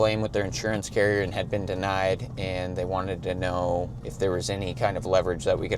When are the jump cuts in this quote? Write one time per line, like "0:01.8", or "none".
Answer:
none